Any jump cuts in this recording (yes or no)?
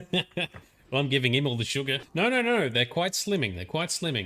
yes